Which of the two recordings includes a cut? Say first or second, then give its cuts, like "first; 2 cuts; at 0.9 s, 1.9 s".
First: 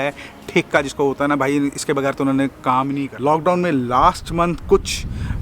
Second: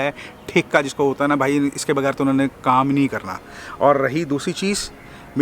first; 1 cut; at 3.0 s